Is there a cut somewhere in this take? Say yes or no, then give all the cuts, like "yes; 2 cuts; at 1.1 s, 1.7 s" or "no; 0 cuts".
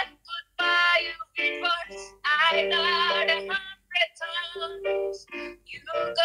no; 0 cuts